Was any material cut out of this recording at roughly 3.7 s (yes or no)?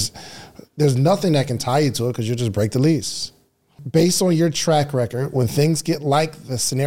yes